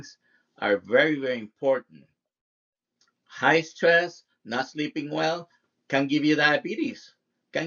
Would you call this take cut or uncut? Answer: uncut